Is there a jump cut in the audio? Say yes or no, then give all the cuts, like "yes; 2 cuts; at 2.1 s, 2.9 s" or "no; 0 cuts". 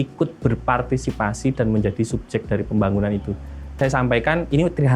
yes; 1 cut; at 3.8 s